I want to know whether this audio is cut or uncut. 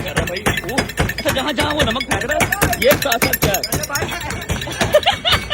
cut